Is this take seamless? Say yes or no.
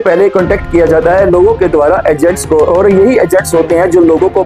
yes